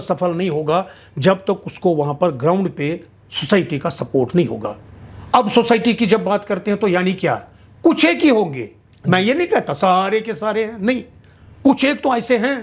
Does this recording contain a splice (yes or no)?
no